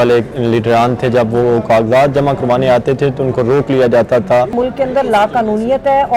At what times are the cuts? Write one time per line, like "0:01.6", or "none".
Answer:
0:04.5